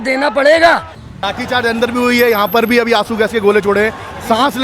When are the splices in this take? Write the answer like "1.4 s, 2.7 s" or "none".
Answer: 0.9 s